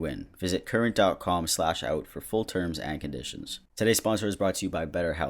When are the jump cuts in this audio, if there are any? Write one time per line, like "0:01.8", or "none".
0:03.5